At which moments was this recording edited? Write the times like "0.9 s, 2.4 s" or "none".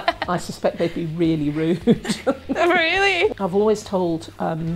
3.3 s